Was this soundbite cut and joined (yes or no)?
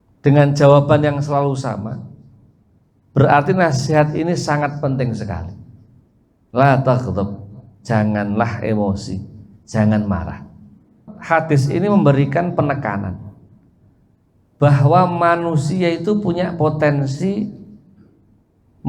yes